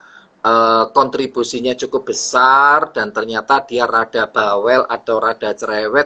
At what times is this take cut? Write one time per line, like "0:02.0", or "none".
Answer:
none